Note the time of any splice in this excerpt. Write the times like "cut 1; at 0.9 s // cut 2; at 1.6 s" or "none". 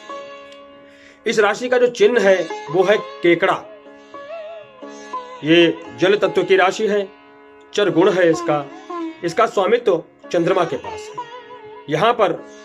cut 1; at 3.6 s // cut 2; at 5.4 s

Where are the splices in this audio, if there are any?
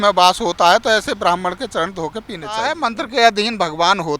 cut 1; at 2.6 s

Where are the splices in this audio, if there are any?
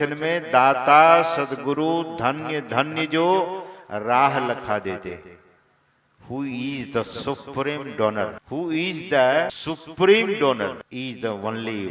cut 1; at 8.4 s // cut 2; at 9.6 s // cut 3; at 10.8 s

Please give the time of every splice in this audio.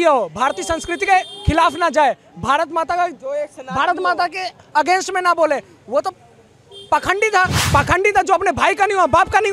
cut 1; at 7.6 s

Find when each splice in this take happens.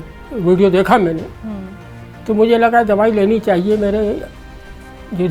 none

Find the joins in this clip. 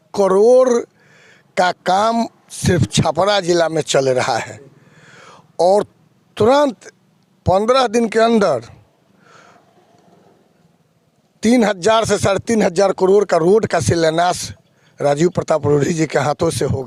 none

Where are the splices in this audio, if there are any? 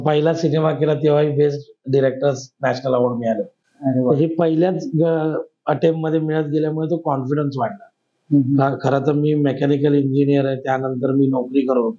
none

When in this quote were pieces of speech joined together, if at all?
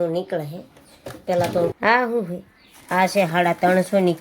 cut 1; at 1.8 s

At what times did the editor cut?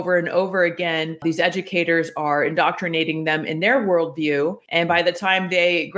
cut 1; at 1.2 s // cut 2; at 4.6 s

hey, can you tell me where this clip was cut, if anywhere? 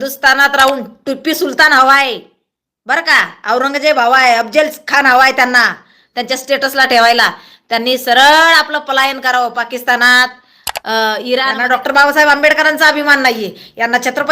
cut 1; at 11.6 s

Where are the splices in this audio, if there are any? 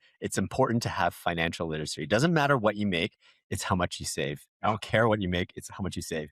cut 1; at 4.5 s

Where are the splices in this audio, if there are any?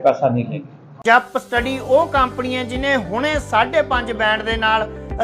cut 1; at 0.9 s

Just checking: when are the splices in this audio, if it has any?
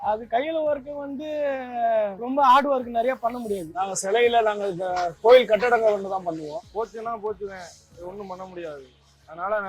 cut 1; at 3.7 s // cut 2; at 6.6 s

